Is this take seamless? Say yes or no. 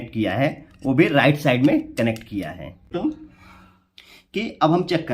no